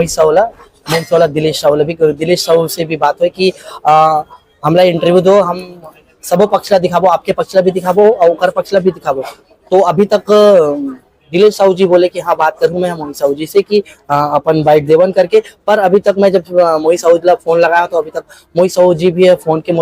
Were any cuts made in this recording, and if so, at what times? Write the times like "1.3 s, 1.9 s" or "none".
none